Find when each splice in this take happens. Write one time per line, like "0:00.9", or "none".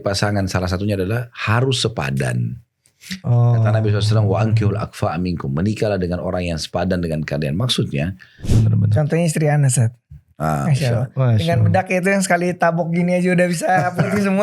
0:08.3